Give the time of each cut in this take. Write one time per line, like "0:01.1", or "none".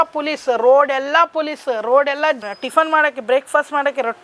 0:02.5